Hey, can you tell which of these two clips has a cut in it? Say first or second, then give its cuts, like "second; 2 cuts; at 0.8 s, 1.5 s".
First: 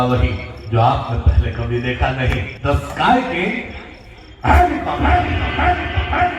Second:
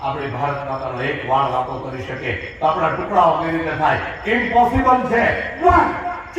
first; 1 cut; at 2.5 s